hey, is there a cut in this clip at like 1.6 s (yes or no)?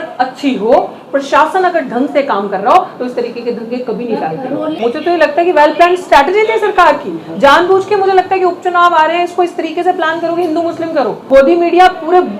no